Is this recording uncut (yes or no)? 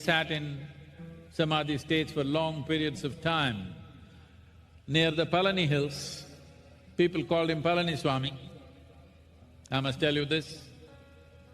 no